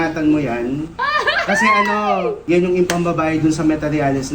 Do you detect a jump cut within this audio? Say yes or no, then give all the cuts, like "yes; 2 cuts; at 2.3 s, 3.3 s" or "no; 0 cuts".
yes; 1 cut; at 2.4 s